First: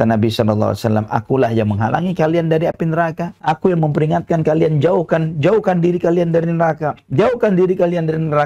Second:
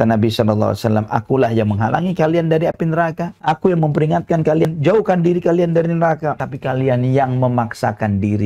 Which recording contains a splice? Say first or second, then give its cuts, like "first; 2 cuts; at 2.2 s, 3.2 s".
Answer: second; 2 cuts; at 4.6 s, 6.4 s